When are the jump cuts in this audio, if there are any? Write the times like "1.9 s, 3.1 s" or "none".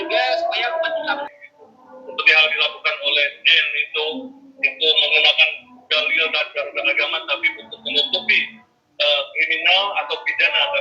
1.3 s